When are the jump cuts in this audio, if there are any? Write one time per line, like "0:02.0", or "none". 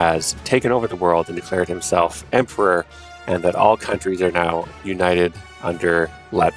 none